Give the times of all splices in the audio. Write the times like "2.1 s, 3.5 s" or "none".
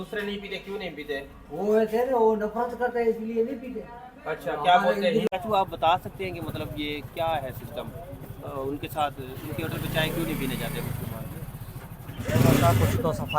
5.3 s